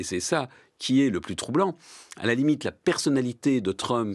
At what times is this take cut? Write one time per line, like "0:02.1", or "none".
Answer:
none